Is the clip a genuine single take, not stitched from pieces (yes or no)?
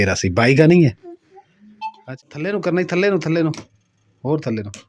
no